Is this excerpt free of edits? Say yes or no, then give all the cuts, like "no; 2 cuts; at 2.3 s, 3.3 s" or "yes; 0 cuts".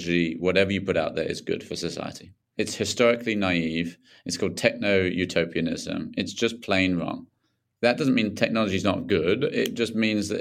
yes; 0 cuts